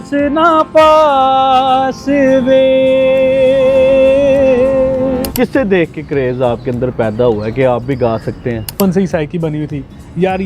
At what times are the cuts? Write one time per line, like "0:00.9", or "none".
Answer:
0:05.3
0:08.7